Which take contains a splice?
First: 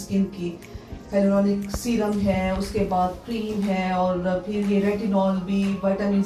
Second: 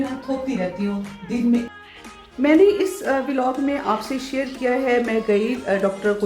second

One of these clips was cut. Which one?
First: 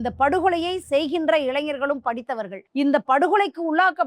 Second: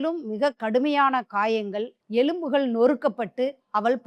first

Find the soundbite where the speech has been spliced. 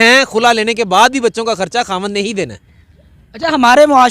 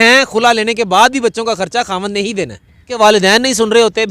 second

